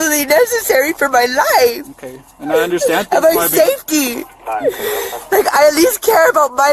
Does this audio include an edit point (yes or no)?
no